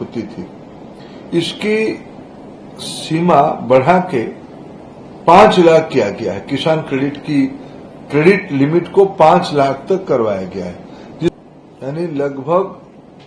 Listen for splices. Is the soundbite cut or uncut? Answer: cut